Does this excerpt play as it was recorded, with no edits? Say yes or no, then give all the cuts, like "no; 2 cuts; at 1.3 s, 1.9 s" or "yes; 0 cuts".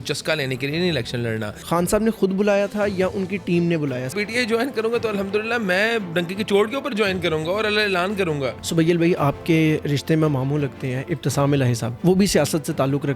no; 4 cuts; at 1.5 s, 4.1 s, 8.6 s, 11.9 s